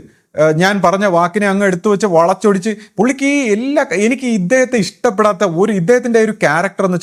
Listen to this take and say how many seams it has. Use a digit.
0